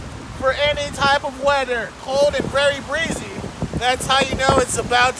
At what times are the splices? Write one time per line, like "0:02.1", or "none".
0:02.0